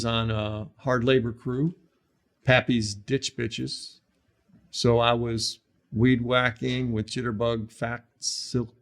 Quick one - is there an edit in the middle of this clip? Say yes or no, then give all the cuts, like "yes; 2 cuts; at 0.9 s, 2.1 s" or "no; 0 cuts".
no; 0 cuts